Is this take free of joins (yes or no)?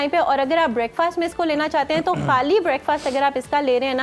yes